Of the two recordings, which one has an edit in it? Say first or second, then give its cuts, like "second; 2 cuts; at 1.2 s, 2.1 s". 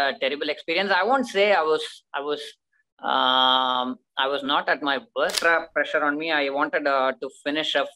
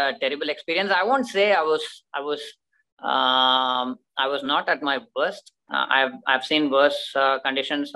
first; 1 cut; at 5.4 s